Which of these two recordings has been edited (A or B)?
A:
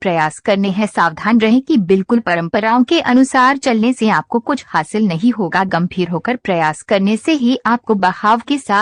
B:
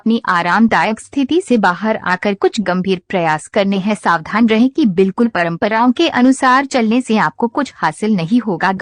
B